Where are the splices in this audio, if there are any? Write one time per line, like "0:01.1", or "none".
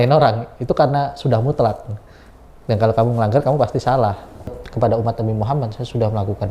0:04.6